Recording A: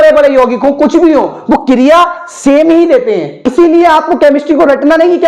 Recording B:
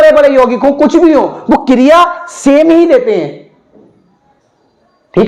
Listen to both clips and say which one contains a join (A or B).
A